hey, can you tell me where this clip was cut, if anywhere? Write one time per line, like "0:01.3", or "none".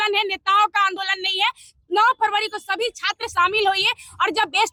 none